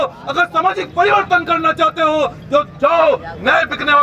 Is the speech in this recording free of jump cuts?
yes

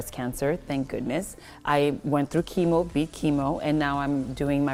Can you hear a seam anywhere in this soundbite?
no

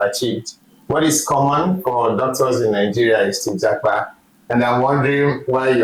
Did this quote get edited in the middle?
no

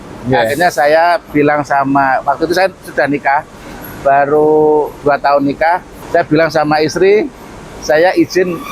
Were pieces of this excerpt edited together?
yes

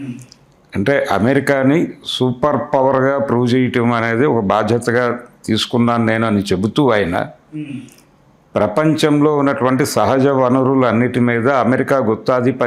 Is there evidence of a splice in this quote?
no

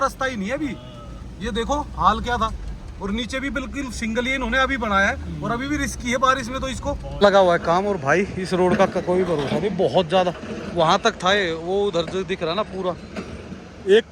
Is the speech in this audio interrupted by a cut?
yes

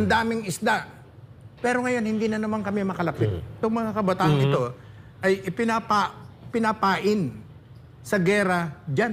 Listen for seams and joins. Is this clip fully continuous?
no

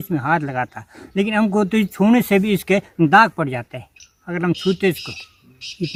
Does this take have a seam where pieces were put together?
no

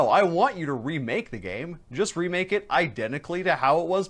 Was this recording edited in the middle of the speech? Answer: no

